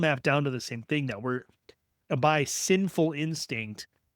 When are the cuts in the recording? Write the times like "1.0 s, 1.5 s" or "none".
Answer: 1.9 s